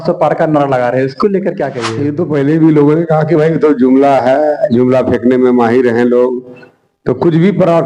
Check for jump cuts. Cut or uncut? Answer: cut